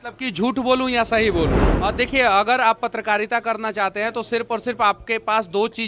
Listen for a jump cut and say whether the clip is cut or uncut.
cut